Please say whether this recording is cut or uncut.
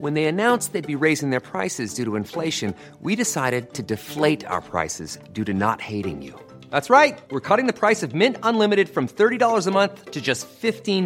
uncut